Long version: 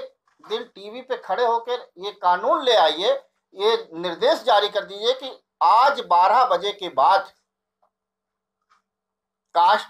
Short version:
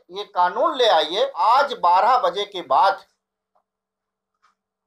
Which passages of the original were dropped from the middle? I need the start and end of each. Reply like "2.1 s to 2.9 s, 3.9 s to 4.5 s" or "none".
3.2 s to 5.6 s